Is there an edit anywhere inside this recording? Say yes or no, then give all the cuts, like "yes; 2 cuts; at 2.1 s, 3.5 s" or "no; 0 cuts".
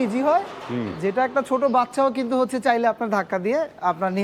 no; 0 cuts